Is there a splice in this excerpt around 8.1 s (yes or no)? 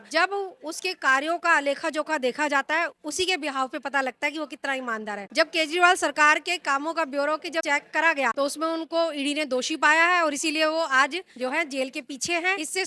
yes